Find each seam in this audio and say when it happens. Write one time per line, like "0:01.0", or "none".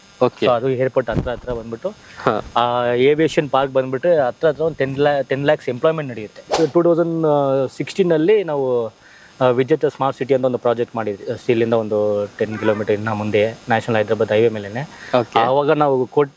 0:06.5

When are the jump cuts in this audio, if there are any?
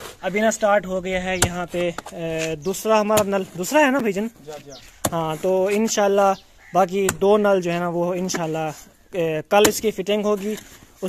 none

